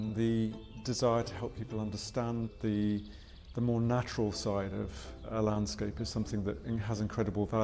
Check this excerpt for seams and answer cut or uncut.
cut